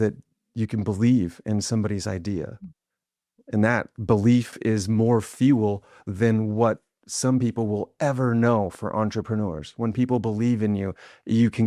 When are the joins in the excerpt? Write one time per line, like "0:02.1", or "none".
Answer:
none